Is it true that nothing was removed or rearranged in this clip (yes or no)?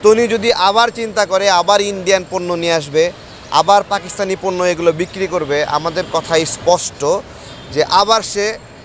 yes